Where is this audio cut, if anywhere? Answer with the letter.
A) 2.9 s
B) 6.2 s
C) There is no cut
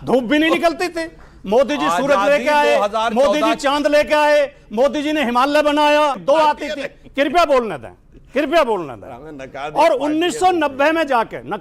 B